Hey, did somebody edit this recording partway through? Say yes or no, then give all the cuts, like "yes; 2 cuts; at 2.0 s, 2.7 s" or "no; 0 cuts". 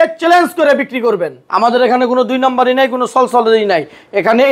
yes; 1 cut; at 1.4 s